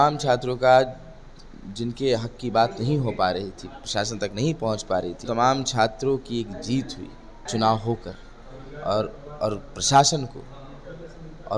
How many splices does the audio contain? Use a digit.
2